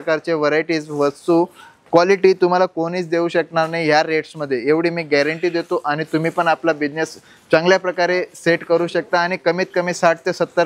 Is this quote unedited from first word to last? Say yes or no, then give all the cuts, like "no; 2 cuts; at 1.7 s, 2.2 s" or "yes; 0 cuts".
yes; 0 cuts